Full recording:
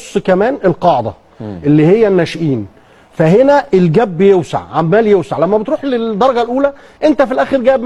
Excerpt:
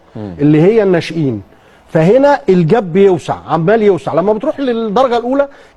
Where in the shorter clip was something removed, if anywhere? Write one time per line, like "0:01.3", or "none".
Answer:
none